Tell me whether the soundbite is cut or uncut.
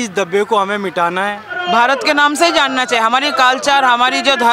cut